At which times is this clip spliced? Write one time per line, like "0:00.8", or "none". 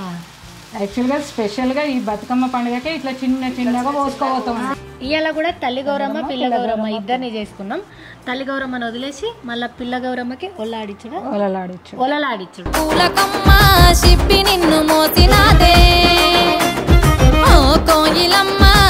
0:04.7
0:12.7